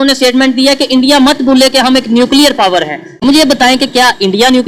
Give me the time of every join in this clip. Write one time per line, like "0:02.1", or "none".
0:03.2

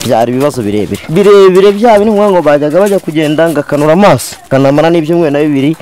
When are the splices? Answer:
0:01.0
0:04.5

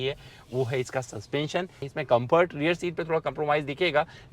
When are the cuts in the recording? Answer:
0:01.9

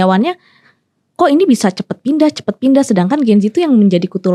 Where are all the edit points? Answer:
none

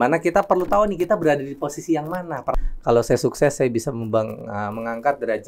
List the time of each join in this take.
0:02.6

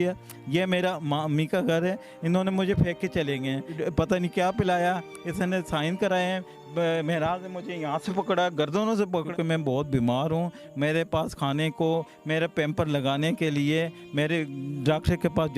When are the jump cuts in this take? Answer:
0:03.7
0:09.3

